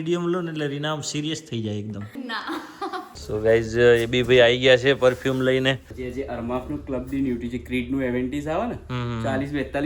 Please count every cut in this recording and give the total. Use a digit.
2